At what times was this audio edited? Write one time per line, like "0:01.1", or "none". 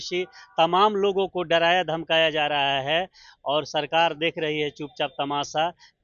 none